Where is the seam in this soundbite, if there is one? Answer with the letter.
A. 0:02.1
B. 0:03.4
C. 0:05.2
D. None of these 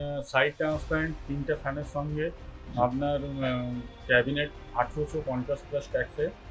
D